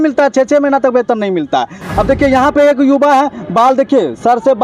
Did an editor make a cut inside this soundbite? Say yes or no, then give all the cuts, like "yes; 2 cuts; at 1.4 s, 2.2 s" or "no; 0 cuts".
yes; 1 cut; at 1.8 s